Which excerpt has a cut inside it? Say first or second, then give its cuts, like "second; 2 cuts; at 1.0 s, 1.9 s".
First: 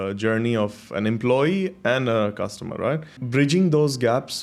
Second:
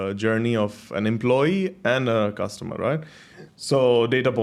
first; 1 cut; at 3.2 s